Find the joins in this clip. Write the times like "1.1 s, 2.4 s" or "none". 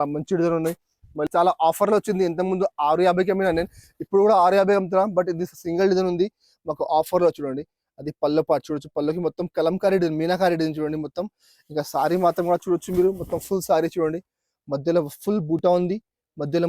1.3 s

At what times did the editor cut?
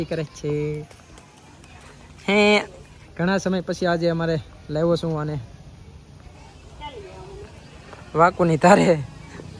none

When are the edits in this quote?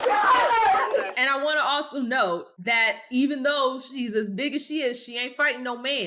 1.1 s, 2.6 s

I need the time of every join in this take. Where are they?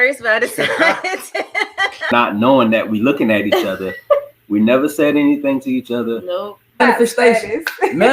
2.1 s, 6.8 s

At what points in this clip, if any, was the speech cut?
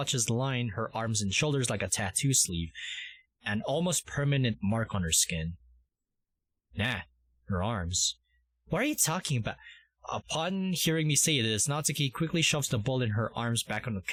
none

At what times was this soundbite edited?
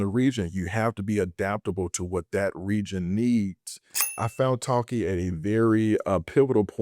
4.1 s

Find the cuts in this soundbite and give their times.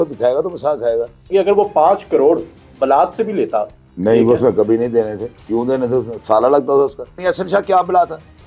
1.3 s, 7.1 s

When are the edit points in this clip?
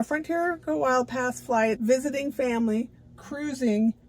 1.8 s

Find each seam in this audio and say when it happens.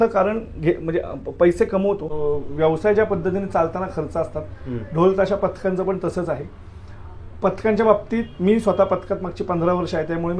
2.1 s

